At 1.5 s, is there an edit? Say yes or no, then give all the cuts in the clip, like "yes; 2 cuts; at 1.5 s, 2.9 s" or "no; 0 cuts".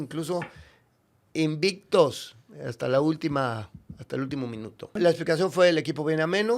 no; 1 cut; at 5.0 s